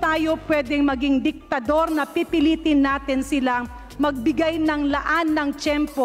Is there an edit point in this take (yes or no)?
no